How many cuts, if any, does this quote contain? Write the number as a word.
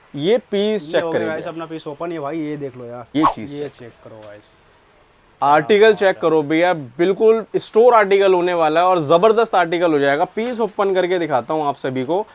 one